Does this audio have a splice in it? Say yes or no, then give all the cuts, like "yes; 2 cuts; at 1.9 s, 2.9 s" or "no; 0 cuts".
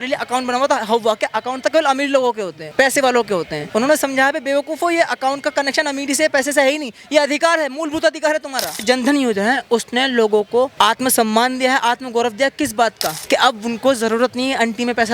yes; 3 cuts; at 2.6 s, 3.6 s, 8.7 s